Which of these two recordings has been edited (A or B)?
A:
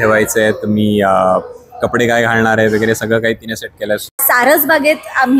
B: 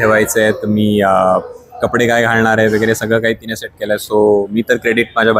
A